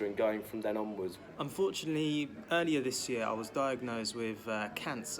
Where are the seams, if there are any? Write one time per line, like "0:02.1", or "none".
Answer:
0:01.2